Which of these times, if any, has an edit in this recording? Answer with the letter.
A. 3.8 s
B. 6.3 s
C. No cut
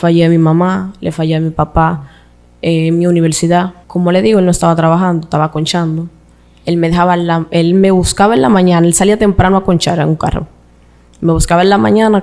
A